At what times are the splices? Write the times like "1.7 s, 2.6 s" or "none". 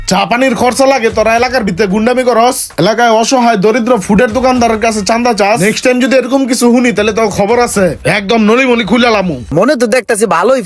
9.4 s

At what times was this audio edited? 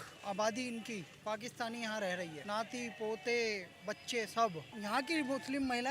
2.4 s, 4.7 s

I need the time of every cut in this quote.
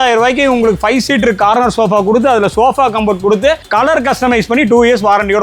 none

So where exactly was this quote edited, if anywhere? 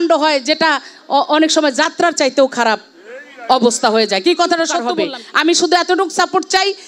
4.9 s

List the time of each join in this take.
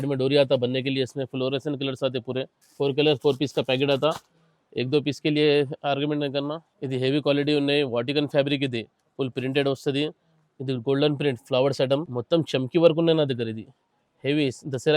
2.6 s, 6.7 s, 12.1 s

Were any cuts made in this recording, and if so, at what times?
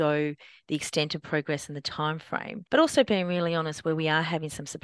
2.5 s

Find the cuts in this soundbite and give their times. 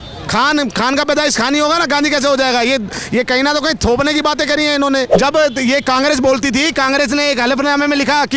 5.2 s

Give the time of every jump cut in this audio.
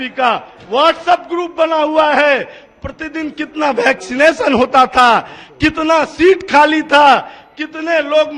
none

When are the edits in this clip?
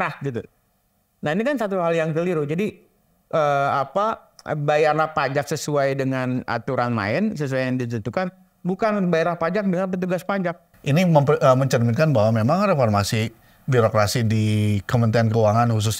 10.7 s

